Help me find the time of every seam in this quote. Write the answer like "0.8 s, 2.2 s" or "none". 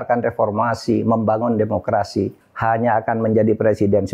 2.4 s